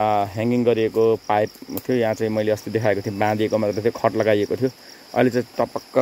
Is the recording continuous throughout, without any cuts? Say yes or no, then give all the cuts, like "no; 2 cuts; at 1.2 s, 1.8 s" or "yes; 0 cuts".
yes; 0 cuts